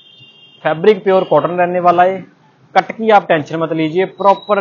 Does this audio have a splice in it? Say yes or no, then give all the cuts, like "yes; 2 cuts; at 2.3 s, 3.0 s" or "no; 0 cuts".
no; 0 cuts